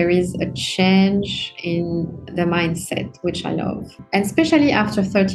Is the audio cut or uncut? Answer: cut